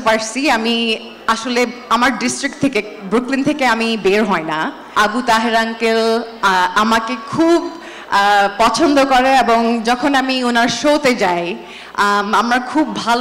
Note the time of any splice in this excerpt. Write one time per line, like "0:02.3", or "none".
0:04.8